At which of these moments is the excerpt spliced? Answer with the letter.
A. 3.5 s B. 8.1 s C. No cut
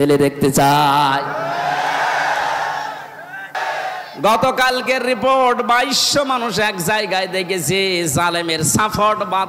A